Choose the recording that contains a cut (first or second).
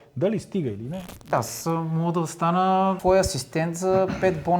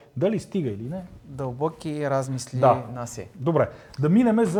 first